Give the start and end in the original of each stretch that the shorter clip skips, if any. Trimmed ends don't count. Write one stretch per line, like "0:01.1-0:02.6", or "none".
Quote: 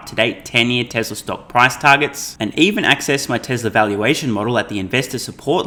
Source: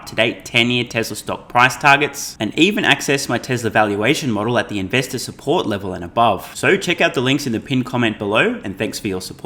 none